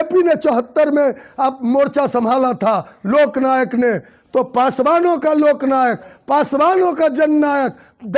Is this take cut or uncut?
uncut